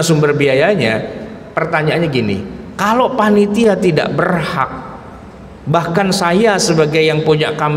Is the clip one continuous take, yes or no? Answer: yes